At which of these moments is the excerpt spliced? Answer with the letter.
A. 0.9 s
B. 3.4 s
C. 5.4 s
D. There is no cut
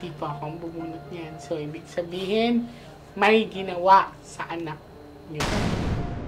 C